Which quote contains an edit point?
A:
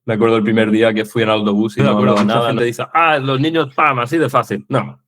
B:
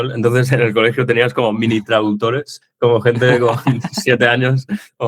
A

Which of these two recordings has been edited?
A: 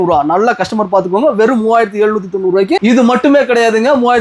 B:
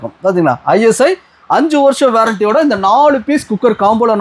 A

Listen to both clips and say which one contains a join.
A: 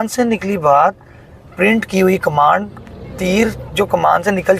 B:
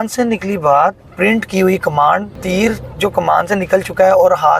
B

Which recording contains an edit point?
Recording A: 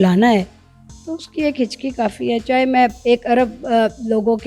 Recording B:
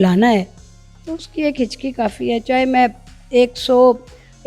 A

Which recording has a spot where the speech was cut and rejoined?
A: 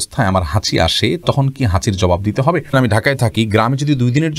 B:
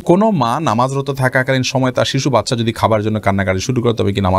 A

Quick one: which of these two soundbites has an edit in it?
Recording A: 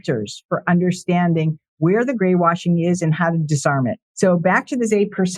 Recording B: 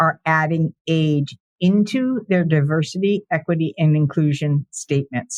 A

